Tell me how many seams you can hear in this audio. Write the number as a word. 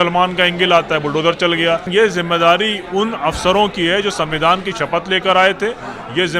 one